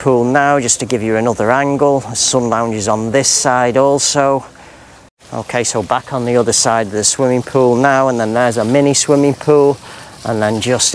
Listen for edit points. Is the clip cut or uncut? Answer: uncut